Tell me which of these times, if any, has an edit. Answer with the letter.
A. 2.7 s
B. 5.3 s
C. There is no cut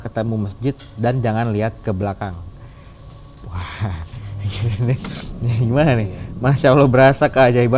C